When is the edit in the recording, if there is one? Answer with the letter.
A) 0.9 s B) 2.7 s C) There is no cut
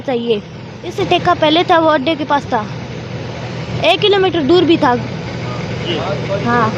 A